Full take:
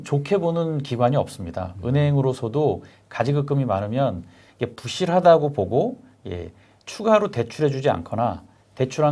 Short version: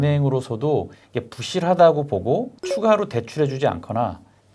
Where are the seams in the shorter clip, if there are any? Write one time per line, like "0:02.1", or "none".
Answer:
0:01.0
0:02.6